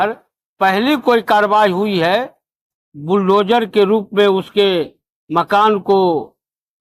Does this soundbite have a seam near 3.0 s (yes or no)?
no